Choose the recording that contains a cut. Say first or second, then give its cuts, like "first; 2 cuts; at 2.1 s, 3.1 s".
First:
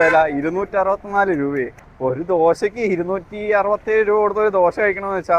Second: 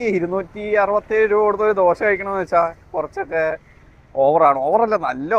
first; 1 cut; at 1.8 s